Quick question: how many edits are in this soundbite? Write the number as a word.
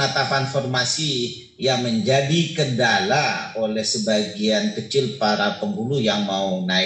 zero